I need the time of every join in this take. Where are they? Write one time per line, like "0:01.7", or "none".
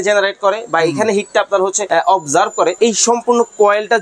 0:01.8
0:02.8